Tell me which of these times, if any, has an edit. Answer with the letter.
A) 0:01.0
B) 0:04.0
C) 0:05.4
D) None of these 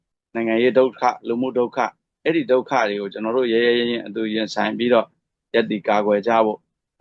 D